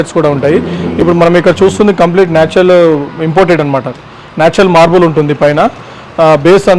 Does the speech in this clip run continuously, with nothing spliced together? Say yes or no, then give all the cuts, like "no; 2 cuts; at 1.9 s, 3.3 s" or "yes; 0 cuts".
yes; 0 cuts